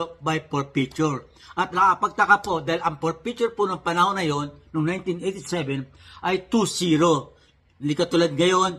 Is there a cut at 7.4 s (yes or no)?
no